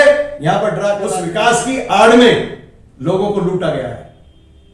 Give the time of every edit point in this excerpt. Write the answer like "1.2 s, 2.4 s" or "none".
1.1 s

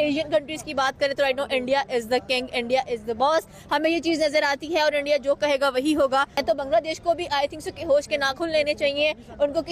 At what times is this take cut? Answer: 6.4 s

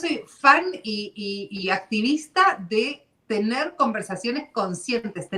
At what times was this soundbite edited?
none

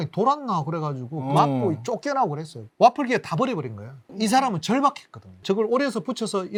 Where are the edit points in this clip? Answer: none

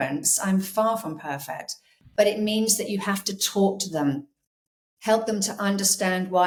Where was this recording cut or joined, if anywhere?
none

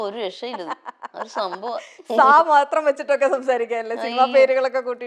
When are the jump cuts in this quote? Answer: none

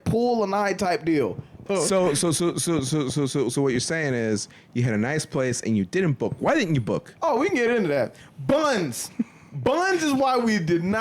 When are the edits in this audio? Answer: 1.6 s

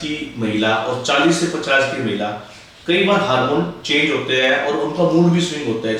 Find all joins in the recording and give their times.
none

